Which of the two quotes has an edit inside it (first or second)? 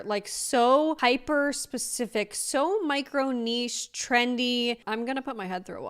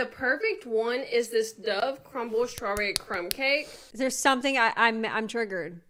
first